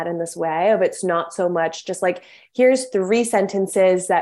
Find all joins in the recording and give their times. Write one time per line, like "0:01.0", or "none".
none